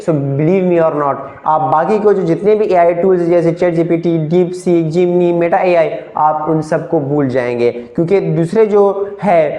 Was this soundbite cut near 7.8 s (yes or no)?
no